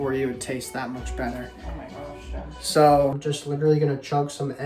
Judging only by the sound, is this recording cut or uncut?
cut